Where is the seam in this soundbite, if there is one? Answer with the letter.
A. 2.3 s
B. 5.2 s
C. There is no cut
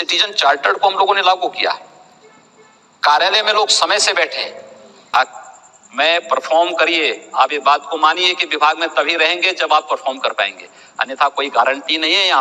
B